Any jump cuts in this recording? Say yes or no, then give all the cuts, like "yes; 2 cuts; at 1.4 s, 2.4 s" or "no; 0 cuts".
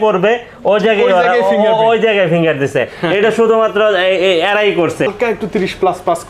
yes; 1 cut; at 5.1 s